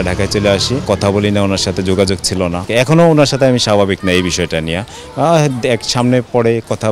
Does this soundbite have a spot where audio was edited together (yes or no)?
yes